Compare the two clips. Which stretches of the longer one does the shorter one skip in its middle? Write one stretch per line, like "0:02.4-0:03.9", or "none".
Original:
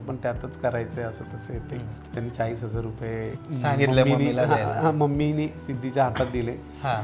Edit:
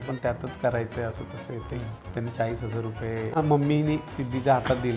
0:03.4-0:04.9